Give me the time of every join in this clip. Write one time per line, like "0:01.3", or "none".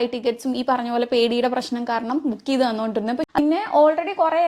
0:03.2